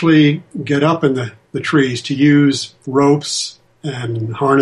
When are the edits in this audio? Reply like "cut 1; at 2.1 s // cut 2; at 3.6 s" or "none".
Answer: cut 1; at 2.7 s